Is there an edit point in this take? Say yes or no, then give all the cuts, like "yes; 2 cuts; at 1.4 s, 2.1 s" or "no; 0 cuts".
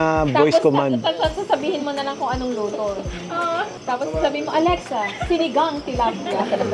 no; 0 cuts